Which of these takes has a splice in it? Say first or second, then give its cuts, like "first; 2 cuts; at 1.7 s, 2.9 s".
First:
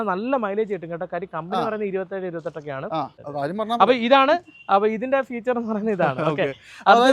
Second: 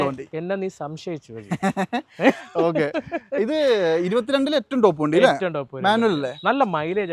first; 1 cut; at 3.2 s